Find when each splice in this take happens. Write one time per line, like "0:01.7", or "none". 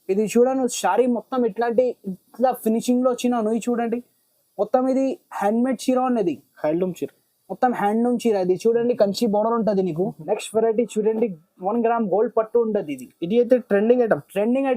0:10.2